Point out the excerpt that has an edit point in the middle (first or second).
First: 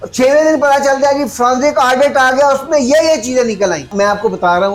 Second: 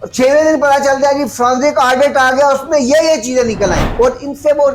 second